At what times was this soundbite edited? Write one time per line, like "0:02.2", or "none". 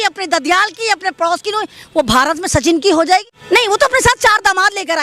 0:03.3